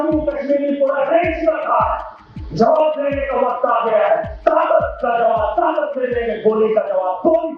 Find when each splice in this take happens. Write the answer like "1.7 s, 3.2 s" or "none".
none